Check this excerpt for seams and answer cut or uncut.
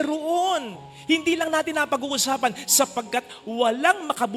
uncut